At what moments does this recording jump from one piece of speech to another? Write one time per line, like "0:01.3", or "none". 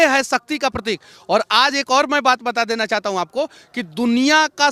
none